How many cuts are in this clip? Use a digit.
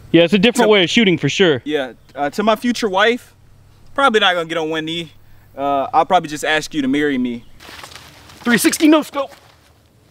1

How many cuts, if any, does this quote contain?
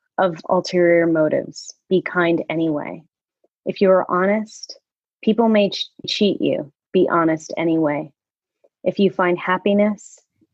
1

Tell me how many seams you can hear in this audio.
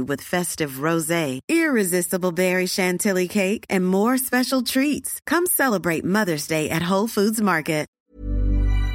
1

